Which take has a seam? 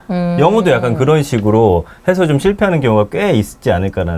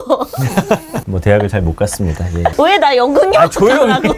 second; 1 cut; at 1.0 s

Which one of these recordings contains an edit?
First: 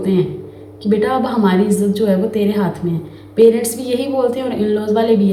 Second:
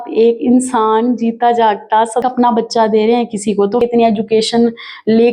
second; 2 cuts; at 2.2 s, 3.8 s

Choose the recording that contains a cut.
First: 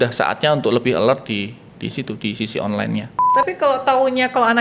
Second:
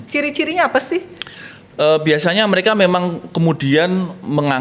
first; 1 cut; at 3.2 s

